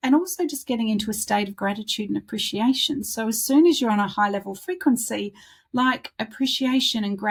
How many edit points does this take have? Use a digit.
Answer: 0